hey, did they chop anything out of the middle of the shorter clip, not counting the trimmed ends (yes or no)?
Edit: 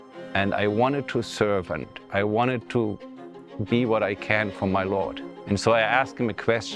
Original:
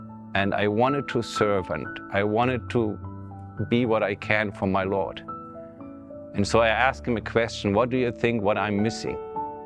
yes